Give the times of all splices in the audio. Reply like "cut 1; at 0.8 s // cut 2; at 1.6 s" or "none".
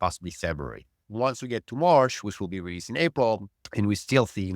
cut 1; at 1.0 s // cut 2; at 3.6 s